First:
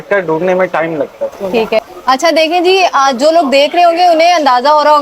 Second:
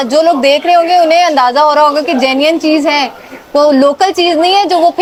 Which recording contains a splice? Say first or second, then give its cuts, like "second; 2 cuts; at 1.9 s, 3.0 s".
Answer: first; 1 cut; at 1.8 s